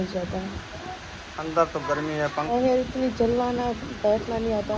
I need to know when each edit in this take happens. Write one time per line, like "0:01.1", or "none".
0:02.5